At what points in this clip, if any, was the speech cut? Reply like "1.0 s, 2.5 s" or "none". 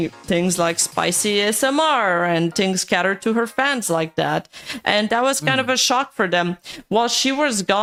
none